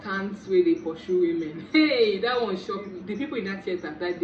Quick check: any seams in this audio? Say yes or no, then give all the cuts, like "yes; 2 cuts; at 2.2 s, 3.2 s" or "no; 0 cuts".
yes; 1 cut; at 2.9 s